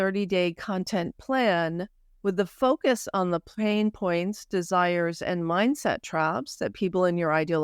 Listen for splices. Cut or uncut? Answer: uncut